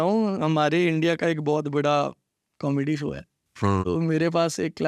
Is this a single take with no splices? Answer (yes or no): no